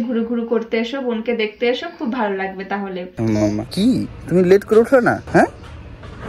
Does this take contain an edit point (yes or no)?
yes